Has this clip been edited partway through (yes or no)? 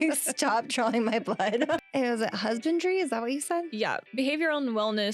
yes